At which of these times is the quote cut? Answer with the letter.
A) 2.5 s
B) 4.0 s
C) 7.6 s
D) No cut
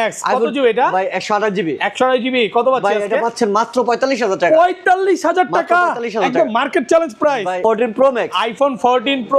C